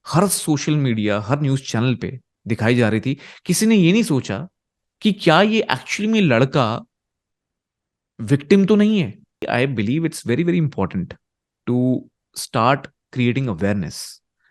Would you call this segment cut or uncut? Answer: cut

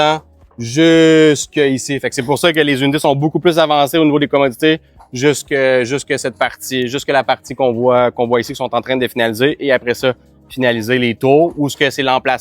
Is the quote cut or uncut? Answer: uncut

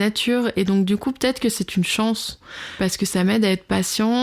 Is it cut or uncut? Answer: cut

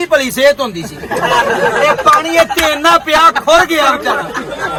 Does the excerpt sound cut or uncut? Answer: uncut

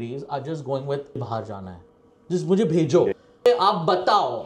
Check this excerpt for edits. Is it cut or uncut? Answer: uncut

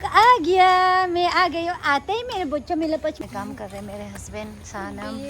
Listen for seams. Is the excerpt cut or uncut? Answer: cut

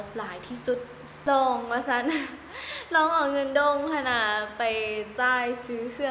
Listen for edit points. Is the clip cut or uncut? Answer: cut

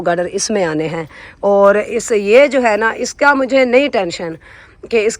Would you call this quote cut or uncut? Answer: uncut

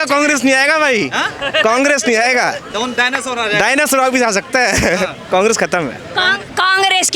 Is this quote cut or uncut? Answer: uncut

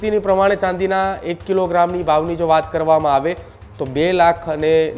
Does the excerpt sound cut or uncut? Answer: uncut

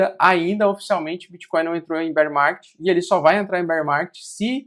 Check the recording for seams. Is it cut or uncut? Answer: uncut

